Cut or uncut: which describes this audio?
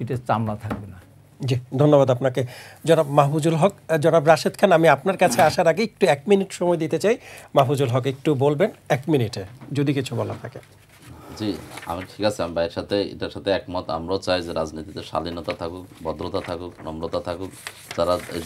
uncut